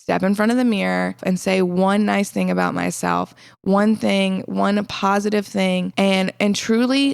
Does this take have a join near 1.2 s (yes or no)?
yes